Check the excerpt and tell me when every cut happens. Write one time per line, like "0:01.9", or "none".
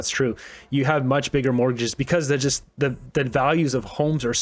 none